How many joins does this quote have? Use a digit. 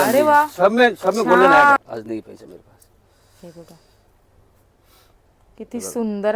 1